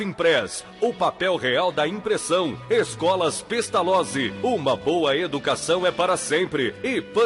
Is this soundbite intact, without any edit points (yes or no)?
yes